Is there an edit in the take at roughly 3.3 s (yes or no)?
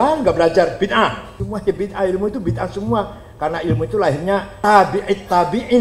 no